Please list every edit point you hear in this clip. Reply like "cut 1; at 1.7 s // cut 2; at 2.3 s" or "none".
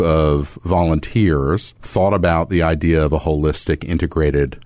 cut 1; at 1.8 s

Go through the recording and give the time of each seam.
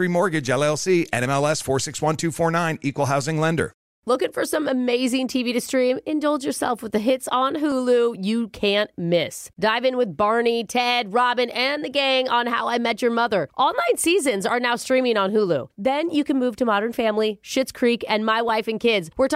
cut 1; at 3.9 s

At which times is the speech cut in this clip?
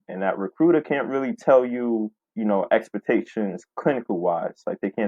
cut 1; at 2.2 s

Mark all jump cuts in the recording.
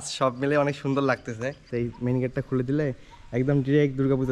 cut 1; at 1.6 s

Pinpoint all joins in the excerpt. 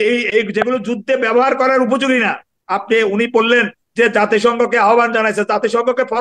none

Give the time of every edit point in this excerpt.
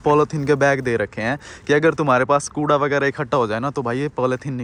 none

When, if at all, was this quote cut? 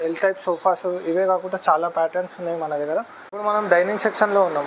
cut 1; at 3.6 s

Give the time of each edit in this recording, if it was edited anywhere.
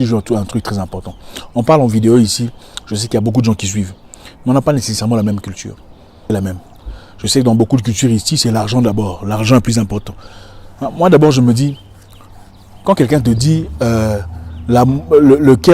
cut 1; at 6.2 s

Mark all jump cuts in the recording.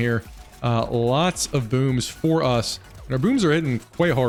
none

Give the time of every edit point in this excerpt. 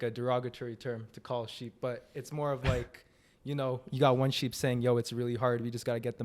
none

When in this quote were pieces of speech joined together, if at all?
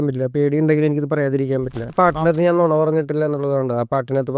cut 1; at 1.9 s

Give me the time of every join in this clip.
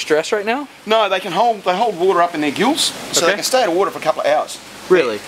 cut 1; at 4.0 s

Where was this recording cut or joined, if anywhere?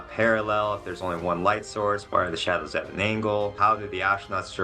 cut 1; at 2.0 s // cut 2; at 3.5 s

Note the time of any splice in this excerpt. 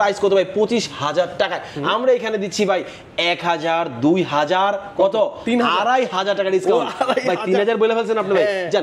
none

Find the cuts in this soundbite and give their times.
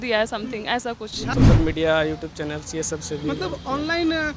cut 1; at 1.3 s

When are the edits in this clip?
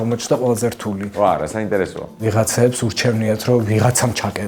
cut 1; at 1.1 s // cut 2; at 2.2 s

